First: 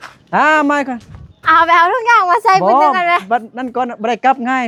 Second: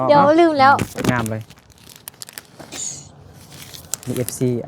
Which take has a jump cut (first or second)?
second